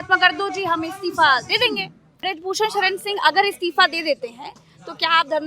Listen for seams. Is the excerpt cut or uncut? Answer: cut